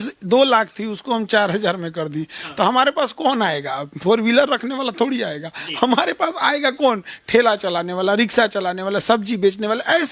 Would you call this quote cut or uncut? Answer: uncut